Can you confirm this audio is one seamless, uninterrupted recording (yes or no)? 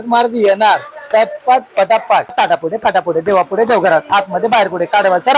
no